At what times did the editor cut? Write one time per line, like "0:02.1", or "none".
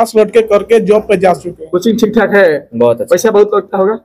0:01.5